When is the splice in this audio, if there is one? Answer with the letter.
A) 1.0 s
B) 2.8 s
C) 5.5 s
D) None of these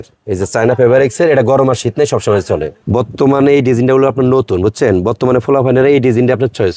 B